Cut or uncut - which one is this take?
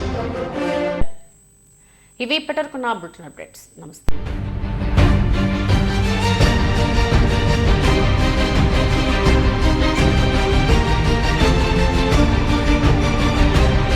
uncut